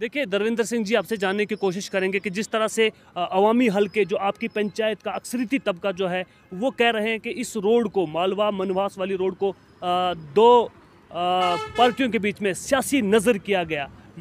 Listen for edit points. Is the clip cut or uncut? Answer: uncut